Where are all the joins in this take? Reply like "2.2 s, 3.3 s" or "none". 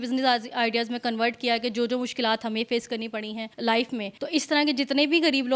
3.5 s, 4.2 s